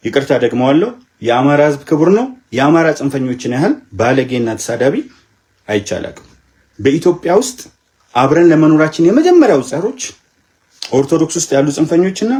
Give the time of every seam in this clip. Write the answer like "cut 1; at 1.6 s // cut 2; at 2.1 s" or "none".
none